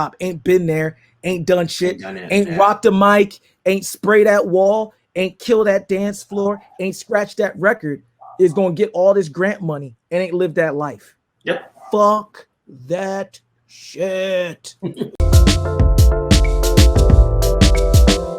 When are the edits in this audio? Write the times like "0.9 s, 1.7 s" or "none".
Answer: 15.3 s